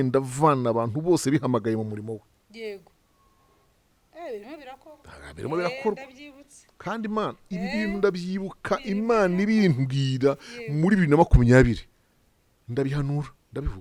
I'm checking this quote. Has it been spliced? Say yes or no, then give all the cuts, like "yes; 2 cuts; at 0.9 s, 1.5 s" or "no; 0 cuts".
no; 0 cuts